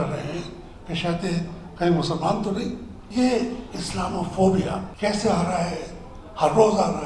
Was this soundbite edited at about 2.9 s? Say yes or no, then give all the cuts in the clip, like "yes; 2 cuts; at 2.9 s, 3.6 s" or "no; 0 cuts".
yes; 2 cuts; at 2.9 s, 4.9 s